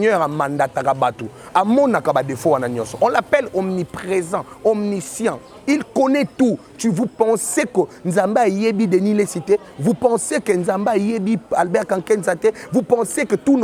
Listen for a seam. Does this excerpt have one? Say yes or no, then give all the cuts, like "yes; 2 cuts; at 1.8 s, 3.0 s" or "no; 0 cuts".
no; 0 cuts